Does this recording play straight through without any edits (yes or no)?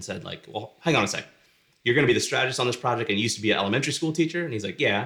yes